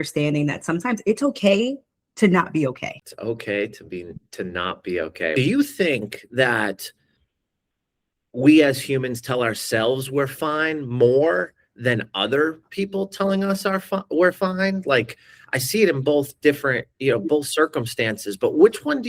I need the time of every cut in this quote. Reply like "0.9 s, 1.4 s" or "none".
3.1 s, 5.3 s

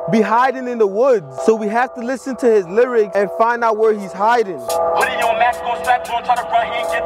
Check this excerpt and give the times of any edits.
none

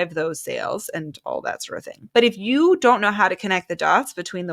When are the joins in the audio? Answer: 2.0 s

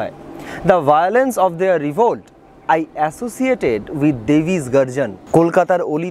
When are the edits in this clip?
5.2 s

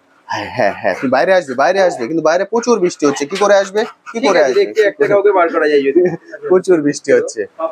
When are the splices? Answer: none

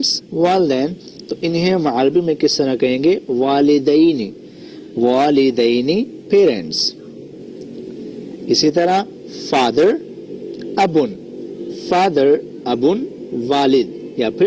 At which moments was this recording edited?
none

